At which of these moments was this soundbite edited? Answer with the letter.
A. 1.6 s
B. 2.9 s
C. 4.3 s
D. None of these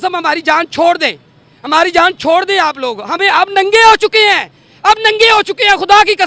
D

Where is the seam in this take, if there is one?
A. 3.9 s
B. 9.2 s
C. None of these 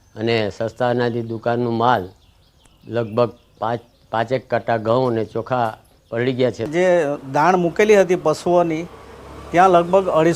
A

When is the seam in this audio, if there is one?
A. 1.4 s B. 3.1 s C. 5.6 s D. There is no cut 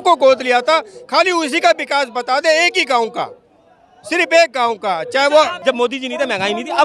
C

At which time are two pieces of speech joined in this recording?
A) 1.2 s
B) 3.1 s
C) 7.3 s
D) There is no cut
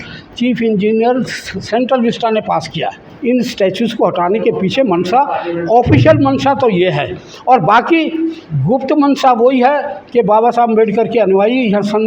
B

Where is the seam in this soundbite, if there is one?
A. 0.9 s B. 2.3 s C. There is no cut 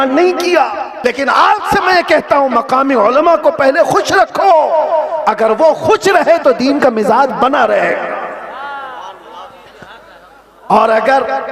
A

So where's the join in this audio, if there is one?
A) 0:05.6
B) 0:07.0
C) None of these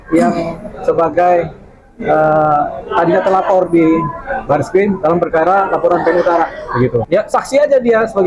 B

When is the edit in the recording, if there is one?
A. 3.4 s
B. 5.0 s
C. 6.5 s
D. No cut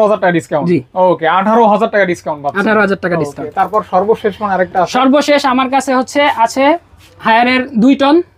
D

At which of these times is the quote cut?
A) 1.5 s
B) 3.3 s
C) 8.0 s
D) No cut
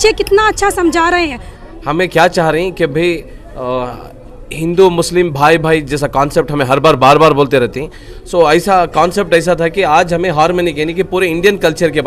A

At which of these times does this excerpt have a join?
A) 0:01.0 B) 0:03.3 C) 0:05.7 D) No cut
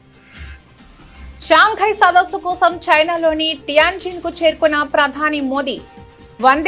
A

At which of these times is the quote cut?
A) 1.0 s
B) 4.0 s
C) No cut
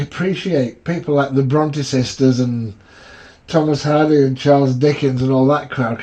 C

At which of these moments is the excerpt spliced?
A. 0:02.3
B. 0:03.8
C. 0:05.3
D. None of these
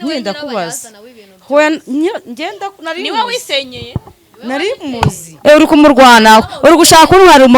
C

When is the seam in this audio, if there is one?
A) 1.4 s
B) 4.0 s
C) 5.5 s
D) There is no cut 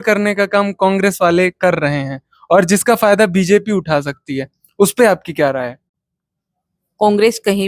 D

